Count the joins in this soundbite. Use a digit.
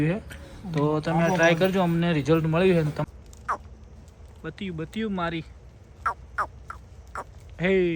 1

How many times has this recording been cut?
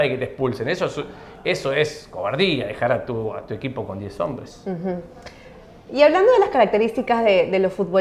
0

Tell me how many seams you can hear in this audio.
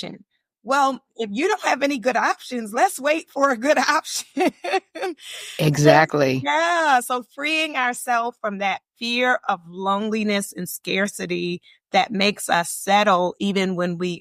0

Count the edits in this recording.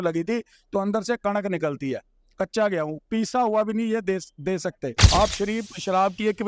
1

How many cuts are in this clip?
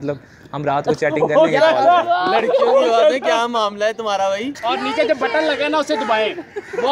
1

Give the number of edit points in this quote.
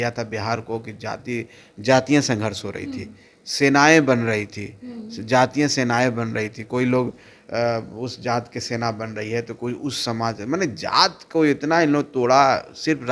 0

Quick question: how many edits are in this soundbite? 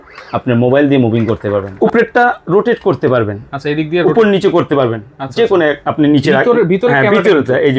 1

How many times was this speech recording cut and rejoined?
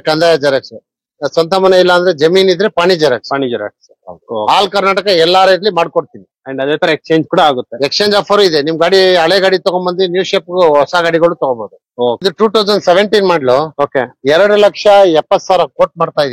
1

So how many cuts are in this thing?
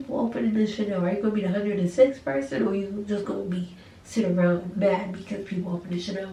0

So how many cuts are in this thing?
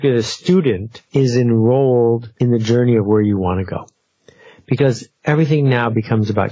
3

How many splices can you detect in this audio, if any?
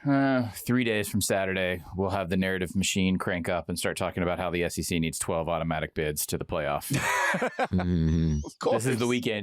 0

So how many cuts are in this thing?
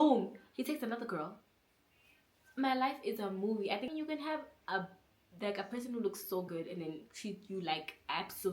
1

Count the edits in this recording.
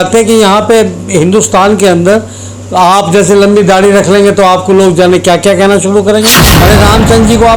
1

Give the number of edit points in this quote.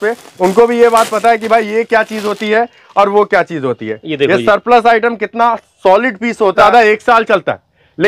1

